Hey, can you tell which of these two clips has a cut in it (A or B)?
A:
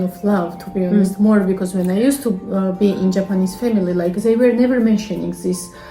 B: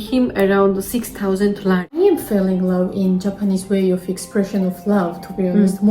B